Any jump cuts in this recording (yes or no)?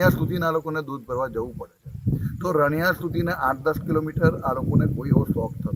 no